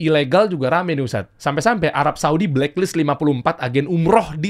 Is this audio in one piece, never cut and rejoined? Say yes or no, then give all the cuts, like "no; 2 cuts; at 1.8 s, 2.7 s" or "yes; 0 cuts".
yes; 0 cuts